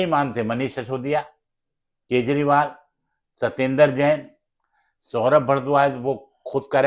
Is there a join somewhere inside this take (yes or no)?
no